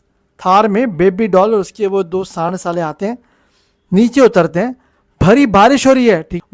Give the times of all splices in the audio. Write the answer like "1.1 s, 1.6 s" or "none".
none